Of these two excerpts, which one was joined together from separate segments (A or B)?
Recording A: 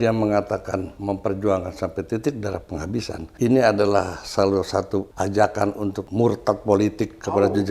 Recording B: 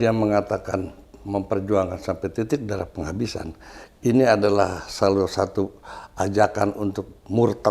A